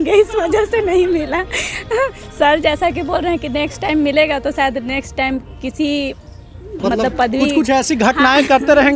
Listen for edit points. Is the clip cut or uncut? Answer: uncut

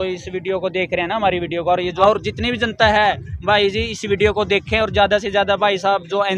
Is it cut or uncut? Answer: cut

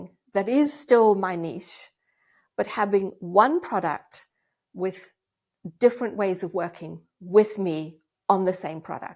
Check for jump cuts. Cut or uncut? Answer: uncut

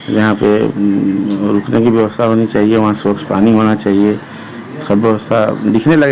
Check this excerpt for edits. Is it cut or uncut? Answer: uncut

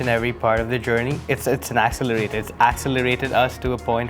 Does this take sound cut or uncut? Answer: cut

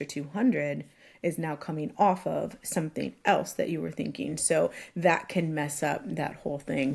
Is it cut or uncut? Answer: uncut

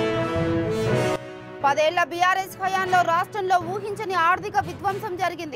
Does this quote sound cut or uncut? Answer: cut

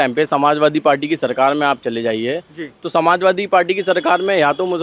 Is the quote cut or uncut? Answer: uncut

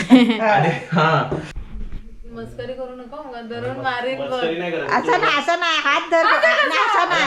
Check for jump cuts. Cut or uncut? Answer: cut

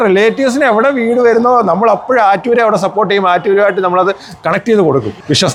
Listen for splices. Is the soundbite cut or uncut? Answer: uncut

